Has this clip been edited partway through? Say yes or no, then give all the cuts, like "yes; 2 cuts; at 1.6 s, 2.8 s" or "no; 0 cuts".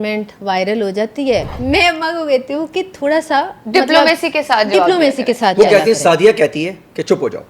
yes; 1 cut; at 1.5 s